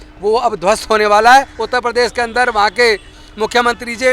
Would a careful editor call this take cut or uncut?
cut